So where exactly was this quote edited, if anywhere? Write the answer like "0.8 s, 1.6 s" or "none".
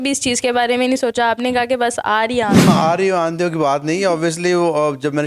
2.6 s